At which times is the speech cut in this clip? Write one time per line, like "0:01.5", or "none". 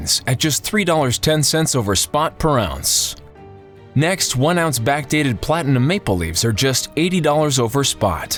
none